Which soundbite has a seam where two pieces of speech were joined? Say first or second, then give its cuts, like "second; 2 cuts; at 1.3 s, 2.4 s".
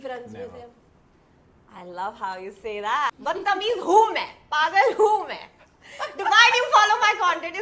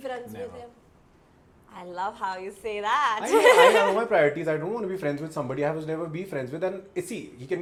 first; 1 cut; at 3.1 s